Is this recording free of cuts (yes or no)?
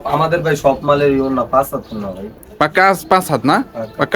yes